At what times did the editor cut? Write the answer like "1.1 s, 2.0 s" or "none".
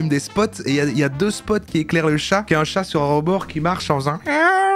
none